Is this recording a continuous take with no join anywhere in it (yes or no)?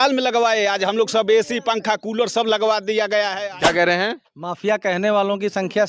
no